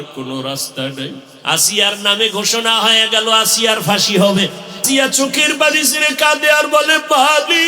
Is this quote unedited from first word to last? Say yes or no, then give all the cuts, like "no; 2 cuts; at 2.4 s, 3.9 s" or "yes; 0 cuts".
no; 1 cut; at 1.3 s